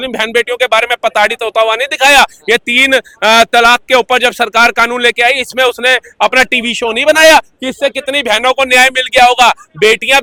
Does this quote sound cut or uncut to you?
uncut